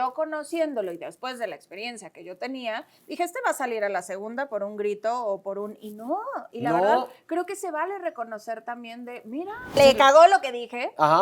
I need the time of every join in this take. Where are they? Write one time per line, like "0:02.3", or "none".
0:09.8